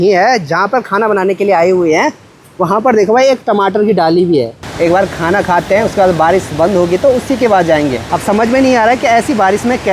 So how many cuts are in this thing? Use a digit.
2